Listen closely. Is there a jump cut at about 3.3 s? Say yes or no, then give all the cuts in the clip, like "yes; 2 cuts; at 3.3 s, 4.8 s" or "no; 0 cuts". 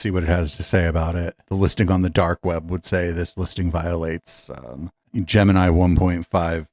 no; 1 cut; at 1.4 s